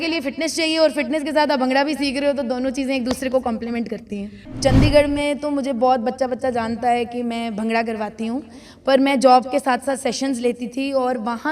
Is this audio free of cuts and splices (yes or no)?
no